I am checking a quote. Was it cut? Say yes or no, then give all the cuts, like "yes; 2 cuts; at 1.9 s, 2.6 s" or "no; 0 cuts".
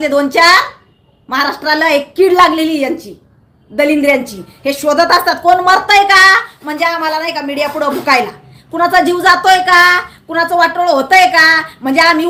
no; 0 cuts